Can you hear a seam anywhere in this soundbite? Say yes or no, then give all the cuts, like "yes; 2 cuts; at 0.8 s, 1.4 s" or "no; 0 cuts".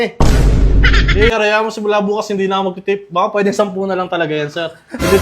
yes; 1 cut; at 1.3 s